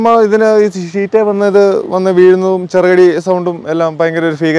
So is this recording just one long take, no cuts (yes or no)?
yes